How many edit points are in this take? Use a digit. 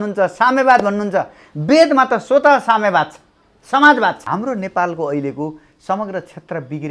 1